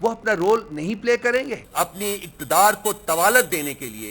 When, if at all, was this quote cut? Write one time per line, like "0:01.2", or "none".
0:01.6